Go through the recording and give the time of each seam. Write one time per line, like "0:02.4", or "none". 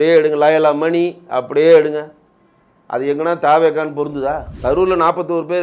0:04.5